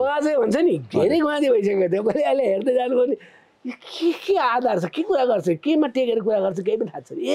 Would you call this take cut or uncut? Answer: uncut